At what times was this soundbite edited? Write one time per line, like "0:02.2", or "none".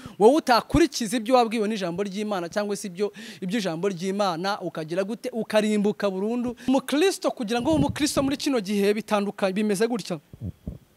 0:06.7